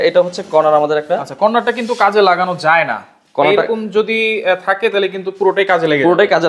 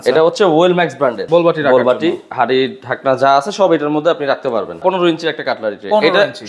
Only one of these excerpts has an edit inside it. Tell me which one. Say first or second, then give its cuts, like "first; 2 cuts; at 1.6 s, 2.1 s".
second; 2 cuts; at 1.2 s, 4.8 s